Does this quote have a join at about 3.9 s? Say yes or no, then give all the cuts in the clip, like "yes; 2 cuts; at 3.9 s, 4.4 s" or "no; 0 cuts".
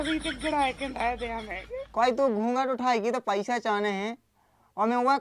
no; 1 cut; at 1.6 s